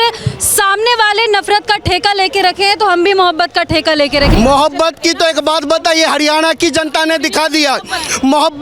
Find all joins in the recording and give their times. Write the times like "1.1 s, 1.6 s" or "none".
4.3 s